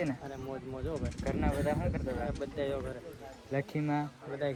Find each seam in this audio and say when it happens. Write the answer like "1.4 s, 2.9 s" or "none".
none